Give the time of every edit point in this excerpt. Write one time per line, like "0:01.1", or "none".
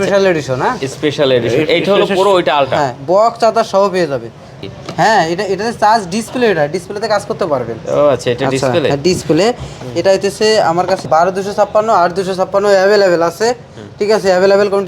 0:04.6
0:11.0